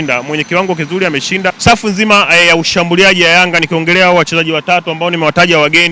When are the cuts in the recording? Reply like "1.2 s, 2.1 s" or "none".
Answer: 1.6 s